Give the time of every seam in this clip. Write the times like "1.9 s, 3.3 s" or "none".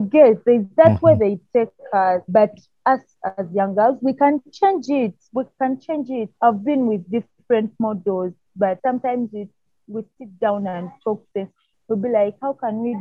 2.3 s, 6.3 s, 8.8 s